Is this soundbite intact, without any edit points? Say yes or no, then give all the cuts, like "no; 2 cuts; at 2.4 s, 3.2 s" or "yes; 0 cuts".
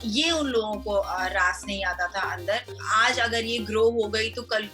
no; 1 cut; at 2.8 s